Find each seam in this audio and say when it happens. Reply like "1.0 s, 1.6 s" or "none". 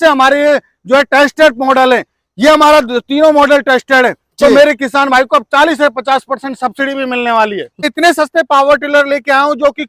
7.9 s